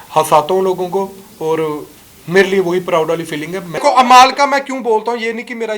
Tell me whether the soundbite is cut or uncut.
cut